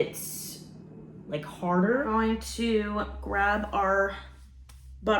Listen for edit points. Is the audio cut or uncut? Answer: cut